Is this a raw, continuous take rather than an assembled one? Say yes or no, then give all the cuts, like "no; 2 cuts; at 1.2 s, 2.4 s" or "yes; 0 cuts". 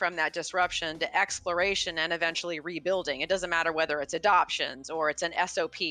yes; 0 cuts